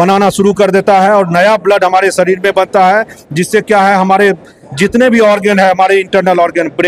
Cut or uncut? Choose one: uncut